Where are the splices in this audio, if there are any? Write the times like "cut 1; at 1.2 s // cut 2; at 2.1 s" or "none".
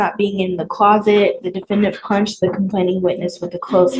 none